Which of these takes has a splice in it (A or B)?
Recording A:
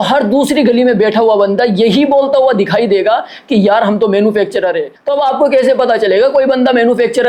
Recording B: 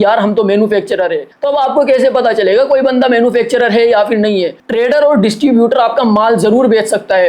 B